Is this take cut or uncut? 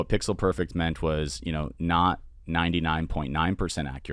uncut